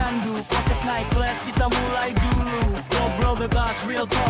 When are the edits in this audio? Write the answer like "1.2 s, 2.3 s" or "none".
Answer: none